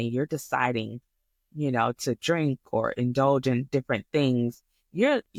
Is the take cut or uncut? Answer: uncut